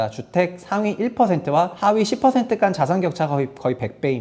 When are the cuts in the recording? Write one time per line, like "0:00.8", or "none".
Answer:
0:01.7